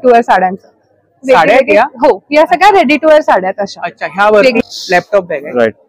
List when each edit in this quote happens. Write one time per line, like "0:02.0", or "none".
0:04.6